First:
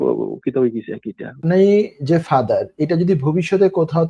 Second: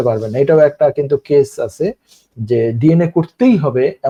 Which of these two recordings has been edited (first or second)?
first